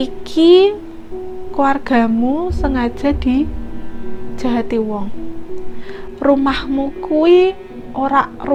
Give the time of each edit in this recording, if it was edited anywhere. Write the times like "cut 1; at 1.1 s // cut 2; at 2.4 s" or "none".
none